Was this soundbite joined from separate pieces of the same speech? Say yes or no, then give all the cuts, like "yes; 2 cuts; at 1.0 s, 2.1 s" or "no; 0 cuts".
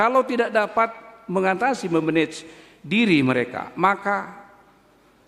no; 0 cuts